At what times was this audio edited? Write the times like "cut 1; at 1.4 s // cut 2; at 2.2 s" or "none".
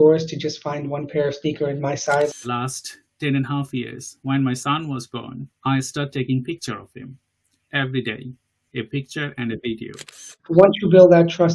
cut 1; at 2.3 s // cut 2; at 10.5 s